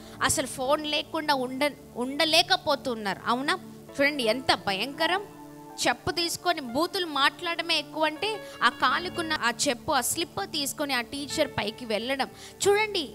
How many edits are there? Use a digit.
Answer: 2